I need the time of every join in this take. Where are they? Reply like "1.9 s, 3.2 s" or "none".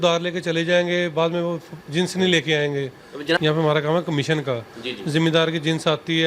3.4 s